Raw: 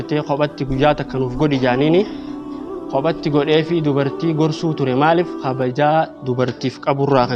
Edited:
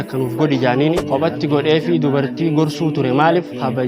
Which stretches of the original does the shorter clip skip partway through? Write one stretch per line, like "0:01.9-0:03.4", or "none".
0:02.0-0:02.8